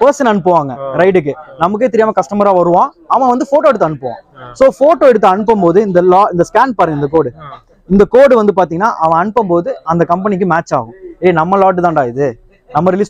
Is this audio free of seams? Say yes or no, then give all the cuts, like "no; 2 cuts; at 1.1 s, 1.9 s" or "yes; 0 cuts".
yes; 0 cuts